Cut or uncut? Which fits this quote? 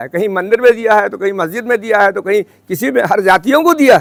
uncut